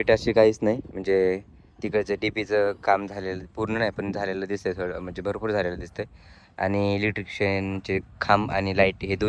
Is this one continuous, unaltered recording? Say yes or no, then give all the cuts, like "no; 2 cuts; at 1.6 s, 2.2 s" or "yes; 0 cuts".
yes; 0 cuts